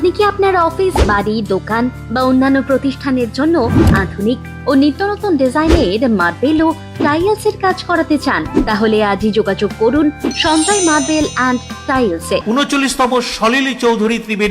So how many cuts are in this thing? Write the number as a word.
one